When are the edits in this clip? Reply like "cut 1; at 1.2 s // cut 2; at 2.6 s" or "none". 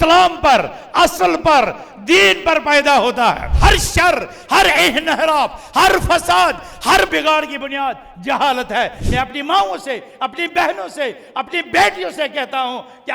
cut 1; at 3.6 s // cut 2; at 9.0 s